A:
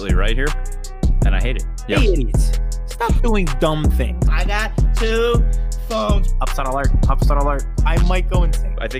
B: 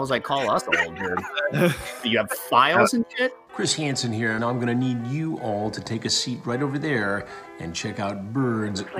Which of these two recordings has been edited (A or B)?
B